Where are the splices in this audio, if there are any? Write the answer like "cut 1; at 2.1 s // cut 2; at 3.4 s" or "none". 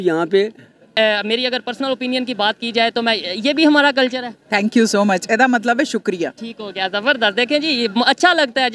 cut 1; at 1.0 s